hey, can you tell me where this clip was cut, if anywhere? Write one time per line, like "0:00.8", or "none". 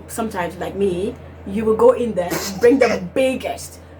none